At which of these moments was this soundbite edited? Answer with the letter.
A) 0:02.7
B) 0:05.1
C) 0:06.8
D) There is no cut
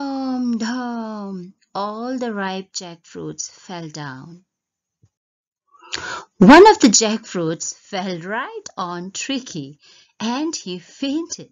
C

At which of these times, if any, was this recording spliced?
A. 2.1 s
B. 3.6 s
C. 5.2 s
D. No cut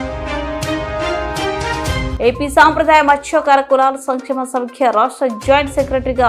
A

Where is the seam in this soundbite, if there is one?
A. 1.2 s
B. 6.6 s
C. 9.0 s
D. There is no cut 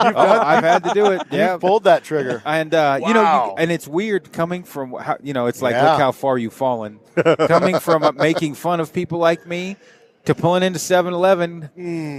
D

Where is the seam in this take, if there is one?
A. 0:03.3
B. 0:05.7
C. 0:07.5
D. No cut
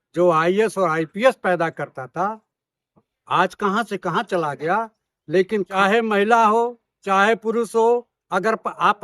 B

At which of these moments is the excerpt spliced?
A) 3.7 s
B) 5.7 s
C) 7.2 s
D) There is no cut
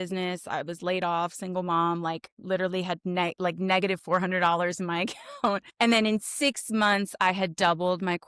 B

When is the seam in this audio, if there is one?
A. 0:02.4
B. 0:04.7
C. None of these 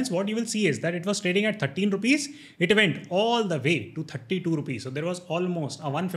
C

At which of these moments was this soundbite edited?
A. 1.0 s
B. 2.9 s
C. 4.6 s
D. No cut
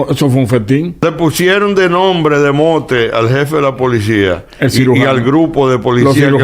A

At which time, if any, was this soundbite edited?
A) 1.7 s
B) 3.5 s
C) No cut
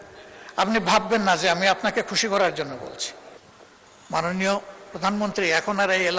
B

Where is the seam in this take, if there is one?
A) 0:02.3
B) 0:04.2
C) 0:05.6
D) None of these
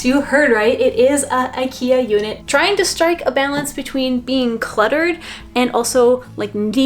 A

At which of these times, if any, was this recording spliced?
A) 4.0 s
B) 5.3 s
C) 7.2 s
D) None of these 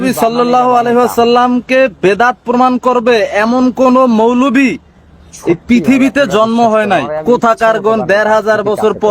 C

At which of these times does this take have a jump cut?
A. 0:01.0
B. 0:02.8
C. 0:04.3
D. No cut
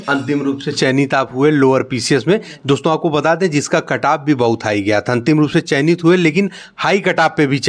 D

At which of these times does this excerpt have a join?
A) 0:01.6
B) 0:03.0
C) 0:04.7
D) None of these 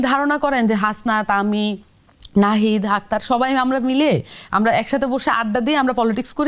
D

